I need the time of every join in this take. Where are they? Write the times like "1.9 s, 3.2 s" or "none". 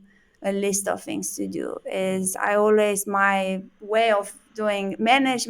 none